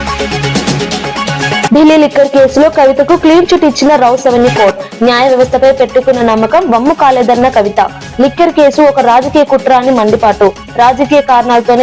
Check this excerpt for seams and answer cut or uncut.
uncut